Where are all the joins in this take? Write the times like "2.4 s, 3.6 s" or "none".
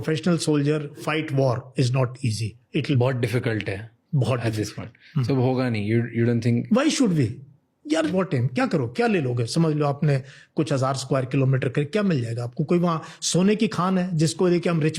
1.0 s, 3.0 s, 8.1 s